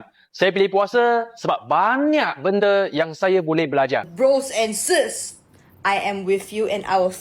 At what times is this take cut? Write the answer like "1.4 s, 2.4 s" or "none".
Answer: 4.1 s